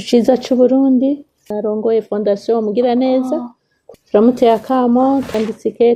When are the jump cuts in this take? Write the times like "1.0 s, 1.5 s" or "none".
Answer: 1.5 s, 3.8 s